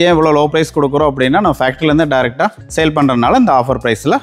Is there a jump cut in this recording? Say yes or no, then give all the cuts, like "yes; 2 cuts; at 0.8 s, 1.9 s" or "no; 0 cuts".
no; 0 cuts